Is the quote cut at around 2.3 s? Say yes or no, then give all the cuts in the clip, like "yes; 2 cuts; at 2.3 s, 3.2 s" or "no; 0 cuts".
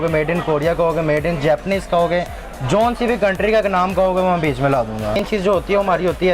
no; 1 cut; at 5.3 s